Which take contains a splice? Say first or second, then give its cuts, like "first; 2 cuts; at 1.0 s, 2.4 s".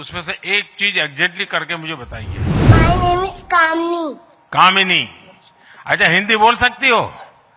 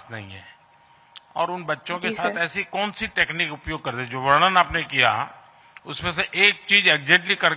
first; 1 cut; at 2.7 s